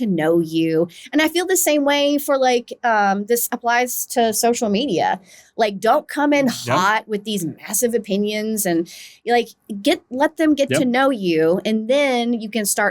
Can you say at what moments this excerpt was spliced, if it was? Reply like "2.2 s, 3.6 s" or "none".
none

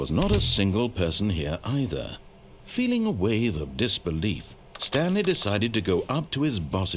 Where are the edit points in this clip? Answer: none

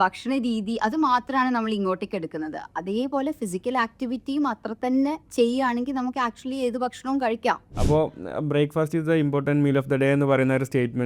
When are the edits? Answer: 7.7 s

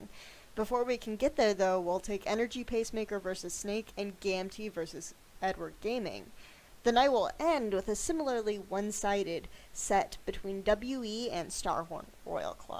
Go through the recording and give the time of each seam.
none

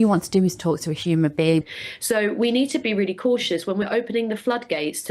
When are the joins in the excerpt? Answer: 1.7 s

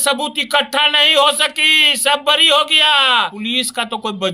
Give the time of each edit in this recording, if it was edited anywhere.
3.4 s

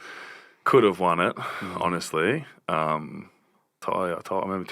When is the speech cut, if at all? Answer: 3.8 s

